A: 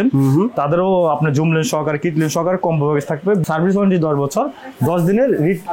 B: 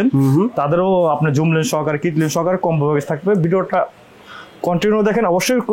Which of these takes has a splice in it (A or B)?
A